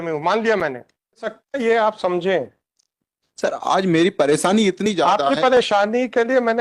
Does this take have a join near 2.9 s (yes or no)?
no